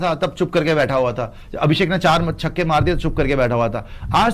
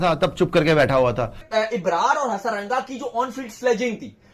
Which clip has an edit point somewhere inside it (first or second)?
second